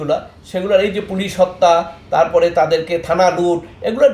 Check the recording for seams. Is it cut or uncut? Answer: uncut